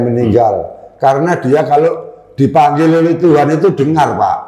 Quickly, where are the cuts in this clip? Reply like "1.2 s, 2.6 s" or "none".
none